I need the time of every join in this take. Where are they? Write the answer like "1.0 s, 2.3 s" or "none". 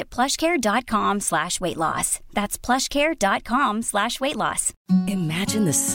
4.7 s